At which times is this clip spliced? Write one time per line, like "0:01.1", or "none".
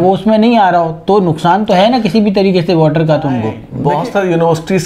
0:03.6